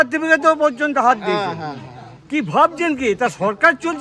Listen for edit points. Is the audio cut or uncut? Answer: uncut